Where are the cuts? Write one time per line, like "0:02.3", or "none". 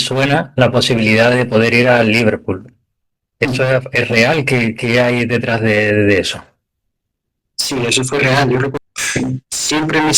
0:08.8